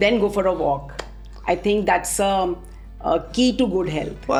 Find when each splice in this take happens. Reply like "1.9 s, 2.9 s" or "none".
none